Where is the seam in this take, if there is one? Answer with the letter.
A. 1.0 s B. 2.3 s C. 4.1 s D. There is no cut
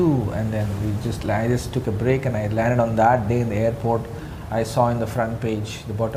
D